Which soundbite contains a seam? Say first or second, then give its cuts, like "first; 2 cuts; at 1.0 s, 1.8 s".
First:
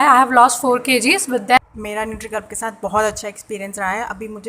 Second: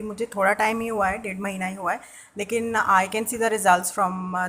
first; 1 cut; at 1.6 s